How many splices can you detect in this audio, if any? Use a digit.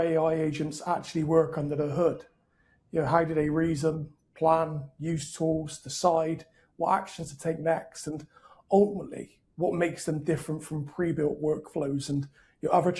0